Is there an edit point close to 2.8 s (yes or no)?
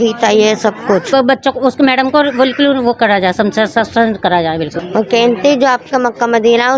no